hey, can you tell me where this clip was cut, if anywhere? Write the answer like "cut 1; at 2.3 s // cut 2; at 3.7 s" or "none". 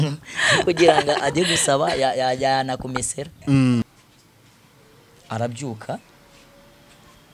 cut 1; at 3.8 s